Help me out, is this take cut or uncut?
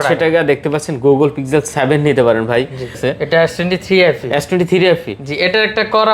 cut